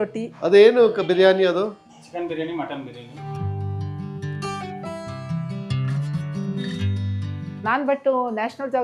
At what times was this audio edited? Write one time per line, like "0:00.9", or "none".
none